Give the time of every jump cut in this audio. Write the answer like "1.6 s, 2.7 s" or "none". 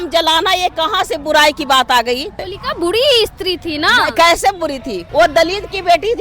2.5 s, 5.0 s